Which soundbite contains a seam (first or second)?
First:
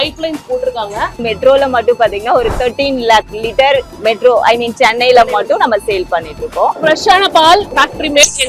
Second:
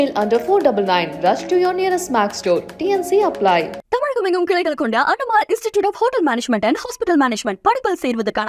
first